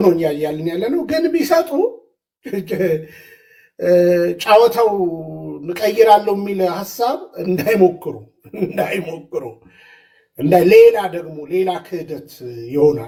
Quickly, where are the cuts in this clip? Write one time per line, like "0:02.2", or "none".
none